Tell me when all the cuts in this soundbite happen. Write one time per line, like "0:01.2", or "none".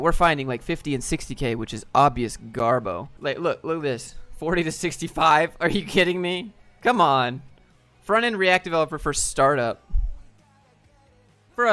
none